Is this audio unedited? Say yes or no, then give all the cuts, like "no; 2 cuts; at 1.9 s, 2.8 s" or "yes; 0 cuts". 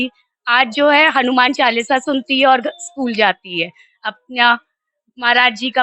yes; 0 cuts